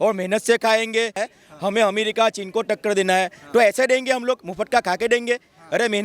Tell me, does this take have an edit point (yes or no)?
yes